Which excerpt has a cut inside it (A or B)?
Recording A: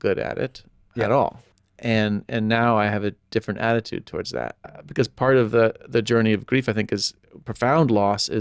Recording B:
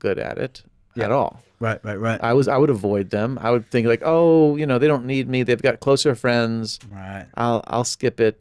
A